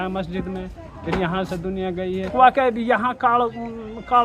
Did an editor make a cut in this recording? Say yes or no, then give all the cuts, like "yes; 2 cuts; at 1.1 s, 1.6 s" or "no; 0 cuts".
yes; 1 cut; at 2.3 s